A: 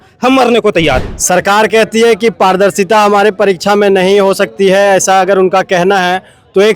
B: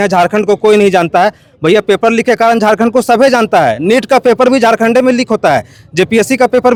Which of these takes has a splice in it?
A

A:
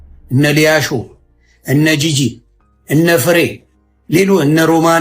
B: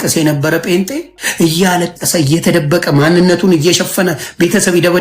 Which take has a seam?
B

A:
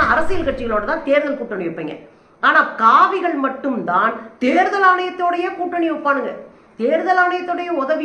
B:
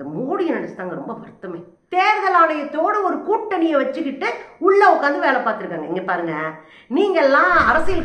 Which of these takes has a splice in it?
B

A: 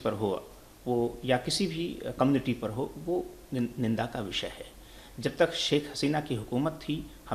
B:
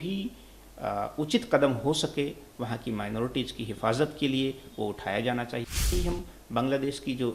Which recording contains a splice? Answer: B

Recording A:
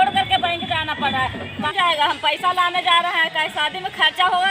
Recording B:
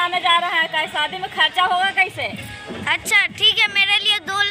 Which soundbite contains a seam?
A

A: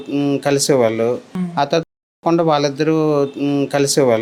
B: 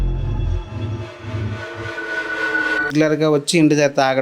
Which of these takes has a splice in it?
B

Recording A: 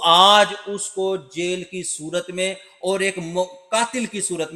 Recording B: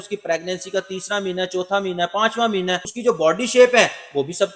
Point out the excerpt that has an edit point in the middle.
B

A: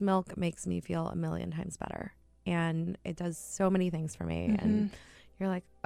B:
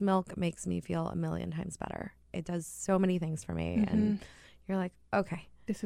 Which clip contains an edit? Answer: B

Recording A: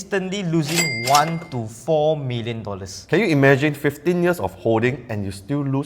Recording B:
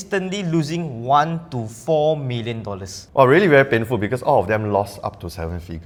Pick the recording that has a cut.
A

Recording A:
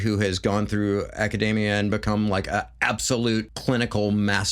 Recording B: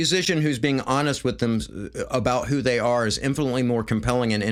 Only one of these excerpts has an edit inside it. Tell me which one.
A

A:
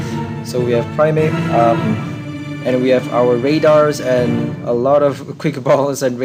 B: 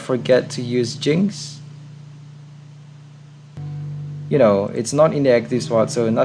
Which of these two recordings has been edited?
B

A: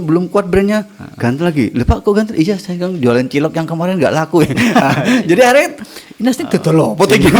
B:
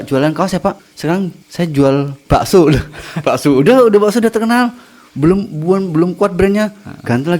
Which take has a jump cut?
B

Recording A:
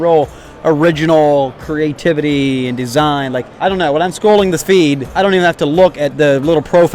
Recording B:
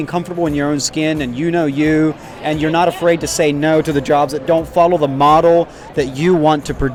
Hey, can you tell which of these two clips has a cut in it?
A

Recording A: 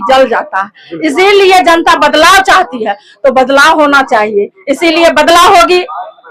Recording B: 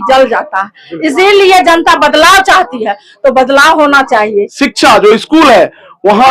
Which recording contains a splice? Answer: B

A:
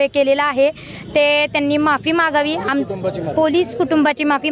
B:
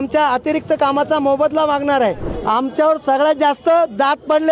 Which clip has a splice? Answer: B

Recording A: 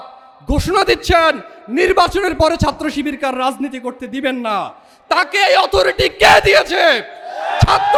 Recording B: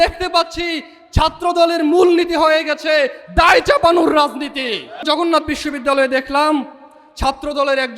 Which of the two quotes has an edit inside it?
B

